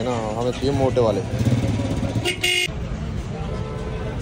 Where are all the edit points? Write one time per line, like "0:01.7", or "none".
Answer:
none